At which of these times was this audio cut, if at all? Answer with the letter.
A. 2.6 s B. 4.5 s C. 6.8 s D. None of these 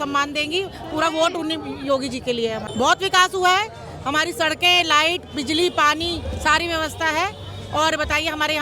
A